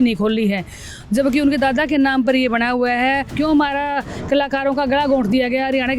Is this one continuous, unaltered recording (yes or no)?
no